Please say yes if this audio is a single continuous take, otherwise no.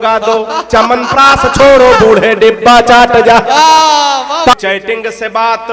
no